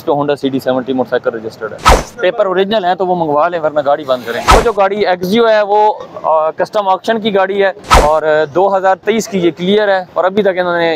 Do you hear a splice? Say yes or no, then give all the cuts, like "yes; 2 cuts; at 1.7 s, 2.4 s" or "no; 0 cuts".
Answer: yes; 3 cuts; at 1.9 s, 4.5 s, 7.9 s